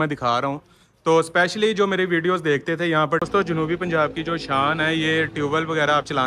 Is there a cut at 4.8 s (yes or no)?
no